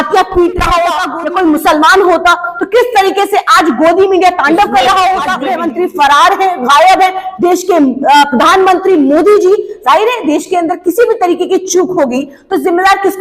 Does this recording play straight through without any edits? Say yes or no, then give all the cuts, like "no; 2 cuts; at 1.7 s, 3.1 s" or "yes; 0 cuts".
no; 2 cuts; at 1.1 s, 5.4 s